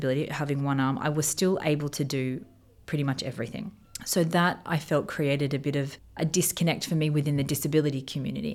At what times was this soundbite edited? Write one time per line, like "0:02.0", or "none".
0:03.9
0:06.0